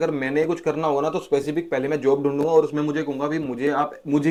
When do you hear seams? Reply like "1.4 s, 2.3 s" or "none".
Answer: none